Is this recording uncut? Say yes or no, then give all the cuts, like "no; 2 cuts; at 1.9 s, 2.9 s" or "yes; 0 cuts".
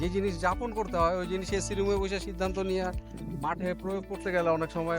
yes; 0 cuts